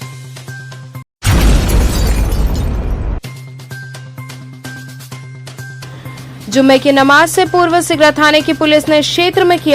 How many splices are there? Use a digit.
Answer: 0